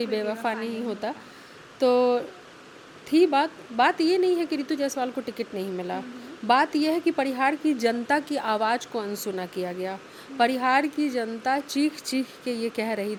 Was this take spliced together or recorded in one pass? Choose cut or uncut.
uncut